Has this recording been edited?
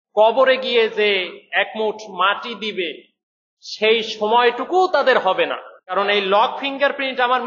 yes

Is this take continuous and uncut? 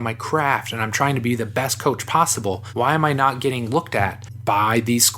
no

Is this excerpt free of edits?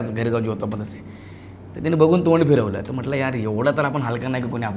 yes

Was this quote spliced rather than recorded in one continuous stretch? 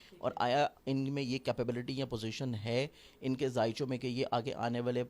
no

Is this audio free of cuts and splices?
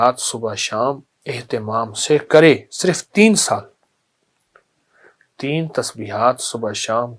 yes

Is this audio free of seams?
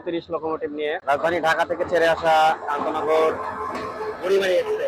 no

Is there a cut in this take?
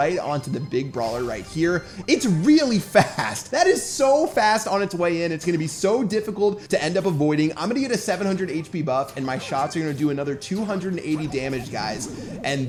no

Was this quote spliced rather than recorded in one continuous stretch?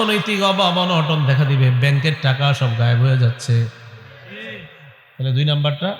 no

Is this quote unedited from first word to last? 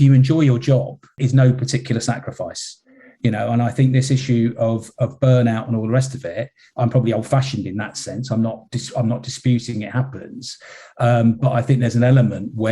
no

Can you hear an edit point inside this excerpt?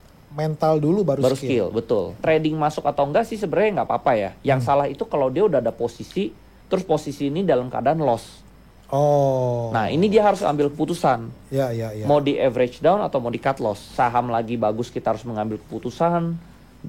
yes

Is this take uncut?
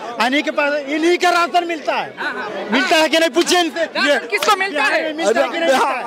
yes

